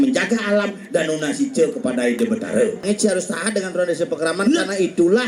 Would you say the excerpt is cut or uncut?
cut